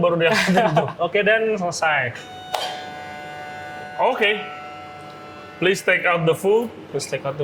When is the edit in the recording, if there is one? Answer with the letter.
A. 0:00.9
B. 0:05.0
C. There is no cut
A